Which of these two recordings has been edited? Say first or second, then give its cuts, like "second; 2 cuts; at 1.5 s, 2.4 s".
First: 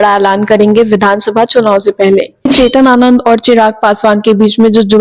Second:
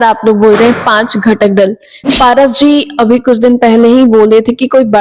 first; 1 cut; at 2.5 s